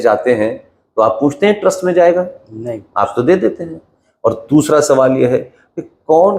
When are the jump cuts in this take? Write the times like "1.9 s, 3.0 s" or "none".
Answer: none